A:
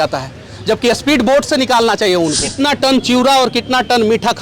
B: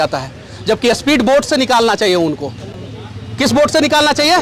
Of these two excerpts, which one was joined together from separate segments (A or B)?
A